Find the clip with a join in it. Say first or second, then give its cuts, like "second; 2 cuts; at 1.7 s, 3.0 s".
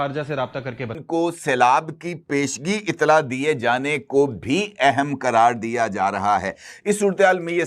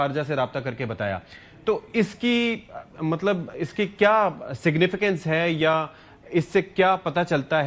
first; 1 cut; at 1.0 s